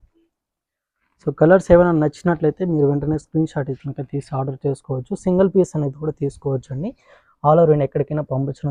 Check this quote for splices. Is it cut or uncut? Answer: uncut